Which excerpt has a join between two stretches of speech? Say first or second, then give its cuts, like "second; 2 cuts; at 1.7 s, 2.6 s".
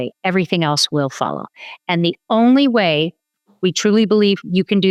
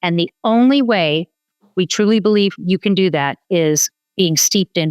second; 1 cut; at 4.0 s